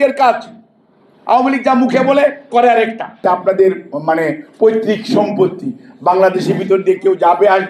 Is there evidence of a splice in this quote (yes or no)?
yes